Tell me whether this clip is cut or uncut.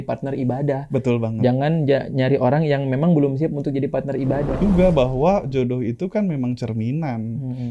cut